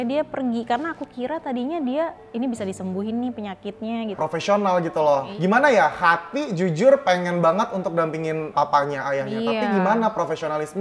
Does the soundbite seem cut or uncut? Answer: cut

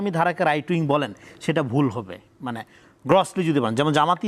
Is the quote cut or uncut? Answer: uncut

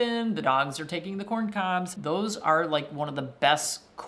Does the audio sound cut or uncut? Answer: cut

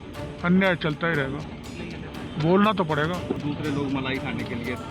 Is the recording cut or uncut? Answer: cut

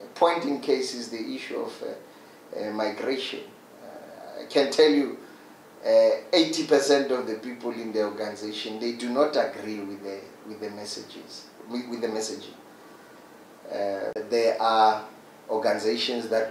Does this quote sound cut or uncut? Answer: cut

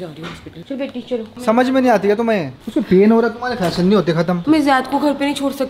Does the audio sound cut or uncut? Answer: cut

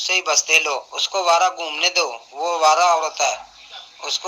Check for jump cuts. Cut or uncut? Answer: cut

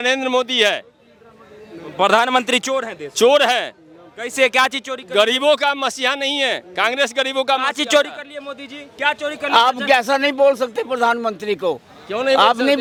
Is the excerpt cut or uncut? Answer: uncut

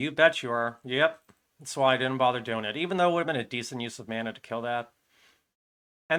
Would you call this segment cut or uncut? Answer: uncut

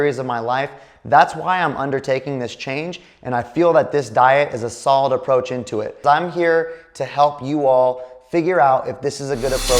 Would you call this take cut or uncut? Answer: cut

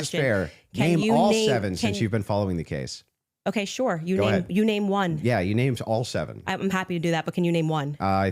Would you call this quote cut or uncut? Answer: cut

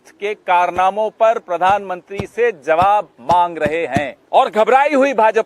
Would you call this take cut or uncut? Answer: cut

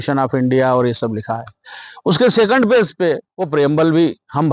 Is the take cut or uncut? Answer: cut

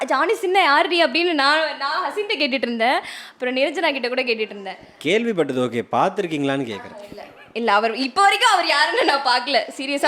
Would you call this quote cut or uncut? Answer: uncut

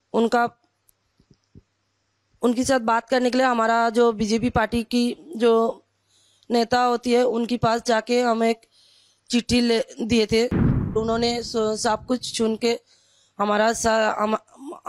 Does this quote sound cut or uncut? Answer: cut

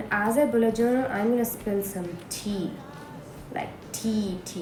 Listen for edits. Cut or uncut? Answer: uncut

